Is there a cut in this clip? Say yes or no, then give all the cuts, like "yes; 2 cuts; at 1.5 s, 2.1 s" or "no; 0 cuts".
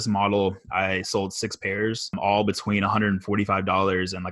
yes; 1 cut; at 2.2 s